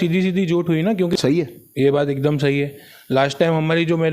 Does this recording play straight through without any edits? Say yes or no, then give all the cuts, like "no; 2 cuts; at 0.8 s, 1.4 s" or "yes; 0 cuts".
no; 1 cut; at 1.1 s